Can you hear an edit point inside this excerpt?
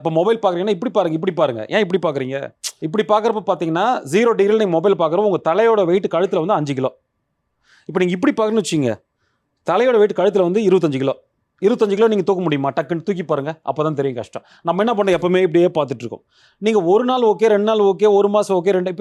no; 0 cuts

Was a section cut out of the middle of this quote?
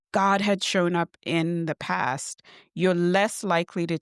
no; 0 cuts

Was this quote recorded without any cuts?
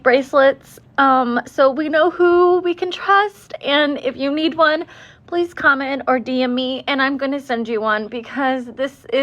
yes; 0 cuts

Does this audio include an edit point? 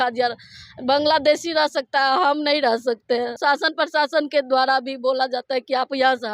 yes; 1 cut; at 3.3 s

